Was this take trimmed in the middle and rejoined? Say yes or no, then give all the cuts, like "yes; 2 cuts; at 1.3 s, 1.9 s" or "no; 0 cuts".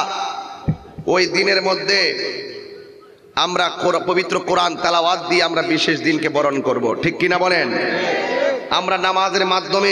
no; 0 cuts